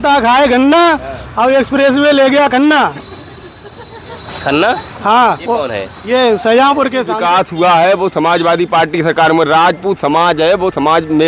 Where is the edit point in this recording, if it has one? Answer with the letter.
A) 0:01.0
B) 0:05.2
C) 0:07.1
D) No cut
C